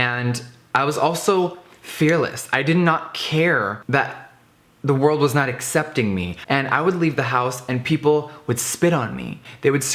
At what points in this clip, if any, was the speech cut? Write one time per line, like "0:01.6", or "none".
0:06.3